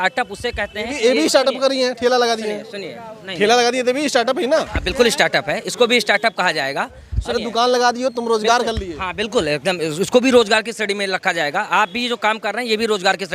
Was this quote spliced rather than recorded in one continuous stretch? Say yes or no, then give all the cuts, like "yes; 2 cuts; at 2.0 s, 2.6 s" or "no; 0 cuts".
no; 0 cuts